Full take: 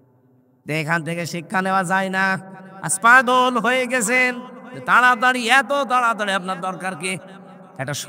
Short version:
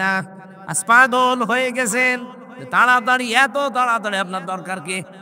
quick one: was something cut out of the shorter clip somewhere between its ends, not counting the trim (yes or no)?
no